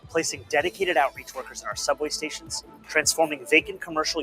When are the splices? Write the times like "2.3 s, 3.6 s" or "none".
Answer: 2.7 s